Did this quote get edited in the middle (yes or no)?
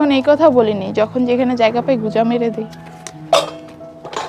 no